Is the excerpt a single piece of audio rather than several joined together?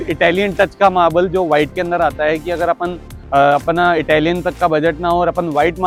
yes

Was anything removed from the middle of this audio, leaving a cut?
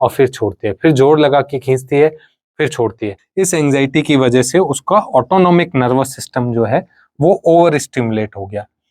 yes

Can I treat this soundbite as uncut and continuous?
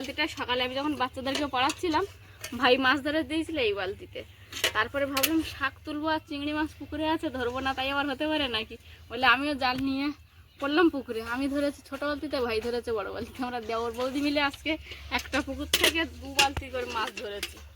yes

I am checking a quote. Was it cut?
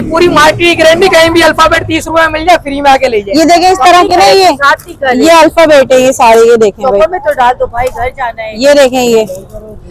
no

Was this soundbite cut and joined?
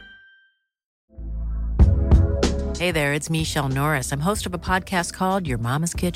yes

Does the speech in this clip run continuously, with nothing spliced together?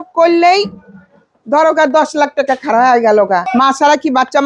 no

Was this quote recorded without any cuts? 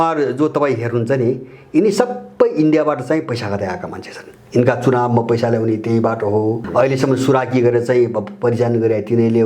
no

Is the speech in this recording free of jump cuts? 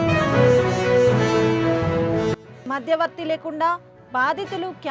no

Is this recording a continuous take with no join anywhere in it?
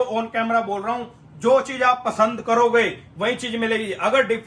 yes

